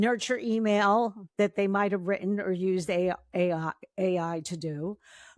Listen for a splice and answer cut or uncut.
uncut